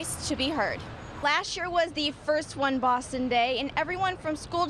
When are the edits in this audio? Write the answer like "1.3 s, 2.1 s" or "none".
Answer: 1.2 s